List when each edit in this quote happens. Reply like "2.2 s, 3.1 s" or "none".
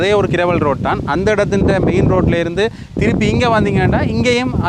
none